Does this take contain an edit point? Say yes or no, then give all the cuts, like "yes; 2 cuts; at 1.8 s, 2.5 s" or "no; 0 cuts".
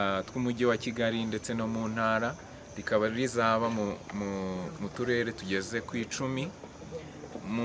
no; 0 cuts